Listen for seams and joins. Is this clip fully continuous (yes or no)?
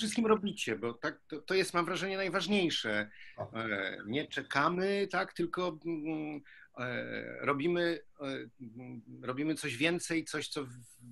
yes